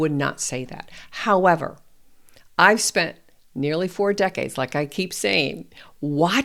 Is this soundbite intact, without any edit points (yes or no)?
yes